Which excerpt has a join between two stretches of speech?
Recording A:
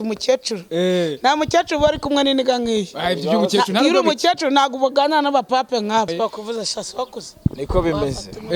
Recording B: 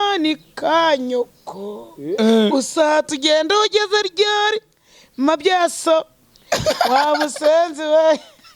A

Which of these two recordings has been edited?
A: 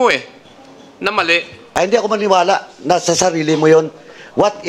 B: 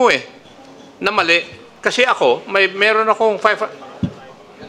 A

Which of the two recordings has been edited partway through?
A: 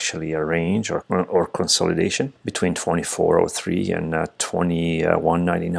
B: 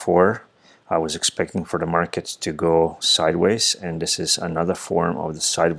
A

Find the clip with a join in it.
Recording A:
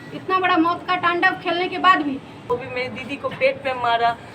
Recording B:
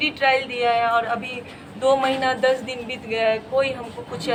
A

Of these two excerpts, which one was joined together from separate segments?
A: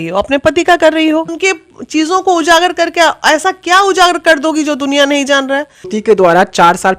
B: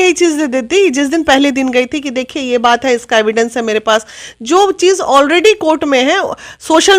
A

